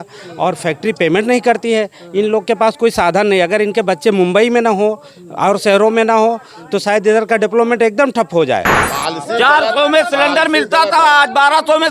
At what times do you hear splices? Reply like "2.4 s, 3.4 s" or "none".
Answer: 8.8 s